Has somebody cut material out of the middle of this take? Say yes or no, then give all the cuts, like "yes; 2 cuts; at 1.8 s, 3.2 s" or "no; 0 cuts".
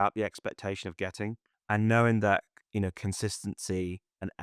yes; 1 cut; at 1.5 s